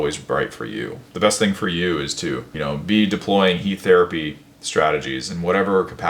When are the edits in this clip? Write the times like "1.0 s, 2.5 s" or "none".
1.0 s, 2.5 s